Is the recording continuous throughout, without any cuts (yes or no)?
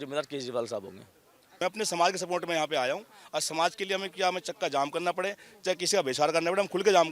no